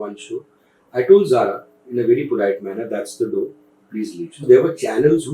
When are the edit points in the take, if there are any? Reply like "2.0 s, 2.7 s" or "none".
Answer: 4.4 s